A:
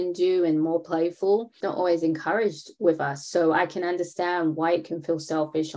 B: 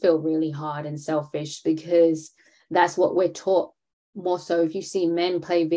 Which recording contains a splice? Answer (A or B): A